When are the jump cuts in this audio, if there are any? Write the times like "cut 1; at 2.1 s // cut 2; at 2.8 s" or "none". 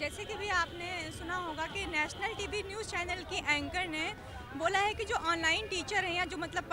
none